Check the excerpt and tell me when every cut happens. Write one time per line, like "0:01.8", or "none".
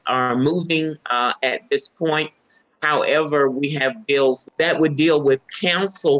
none